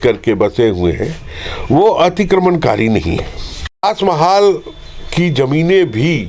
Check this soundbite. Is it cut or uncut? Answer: cut